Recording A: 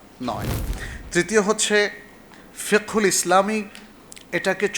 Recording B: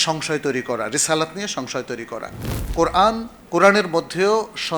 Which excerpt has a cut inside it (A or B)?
B